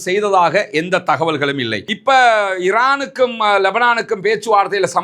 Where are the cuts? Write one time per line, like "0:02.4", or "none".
0:01.8